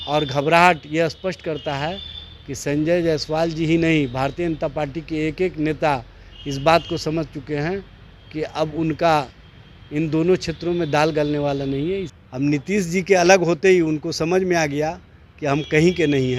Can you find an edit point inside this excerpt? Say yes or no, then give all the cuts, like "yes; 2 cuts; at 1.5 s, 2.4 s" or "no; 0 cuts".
yes; 1 cut; at 12.2 s